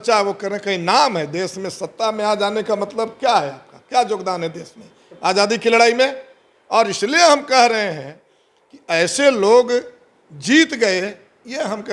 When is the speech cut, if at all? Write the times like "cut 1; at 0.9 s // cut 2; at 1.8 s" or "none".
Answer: none